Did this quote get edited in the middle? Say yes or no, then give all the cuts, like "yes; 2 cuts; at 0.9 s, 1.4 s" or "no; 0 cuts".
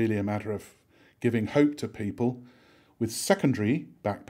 no; 0 cuts